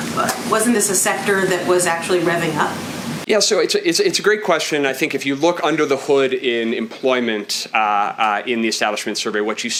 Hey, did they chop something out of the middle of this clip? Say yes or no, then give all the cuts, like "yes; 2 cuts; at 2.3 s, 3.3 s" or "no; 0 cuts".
no; 0 cuts